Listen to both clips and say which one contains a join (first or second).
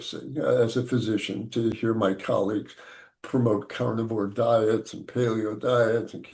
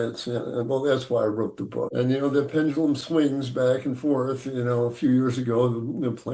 second